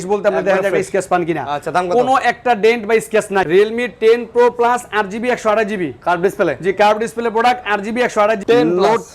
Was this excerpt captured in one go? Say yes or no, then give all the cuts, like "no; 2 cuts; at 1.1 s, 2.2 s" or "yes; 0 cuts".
no; 2 cuts; at 3.5 s, 8.4 s